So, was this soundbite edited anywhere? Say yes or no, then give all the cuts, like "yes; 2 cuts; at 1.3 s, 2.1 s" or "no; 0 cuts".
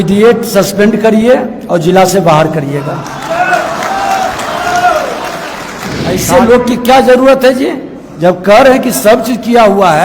yes; 1 cut; at 6.2 s